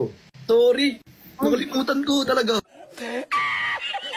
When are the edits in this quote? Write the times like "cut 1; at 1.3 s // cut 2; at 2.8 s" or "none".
cut 1; at 2.6 s